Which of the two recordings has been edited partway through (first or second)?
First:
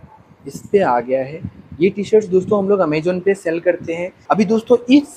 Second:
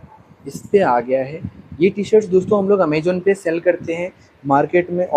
first